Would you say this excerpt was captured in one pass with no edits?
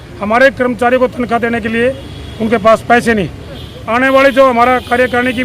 no; 1 cut; at 3.7 s

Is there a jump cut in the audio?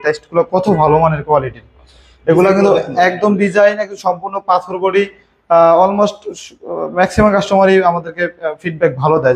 no; 0 cuts

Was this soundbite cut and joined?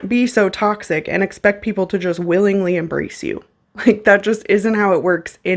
no; 0 cuts

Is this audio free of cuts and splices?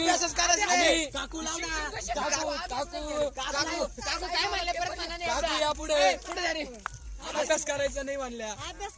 yes; 0 cuts

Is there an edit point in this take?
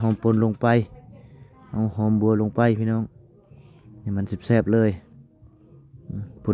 no; 0 cuts

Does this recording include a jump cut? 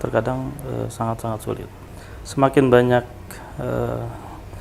yes; 1 cut; at 1.7 s

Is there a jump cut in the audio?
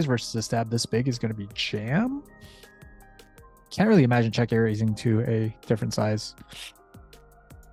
no; 0 cuts

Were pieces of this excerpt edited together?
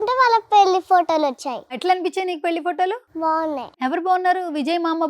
yes; 2 cuts; at 1.7 s, 3.4 s

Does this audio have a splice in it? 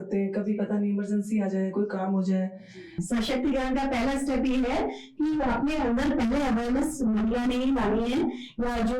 yes; 1 cut; at 3.0 s

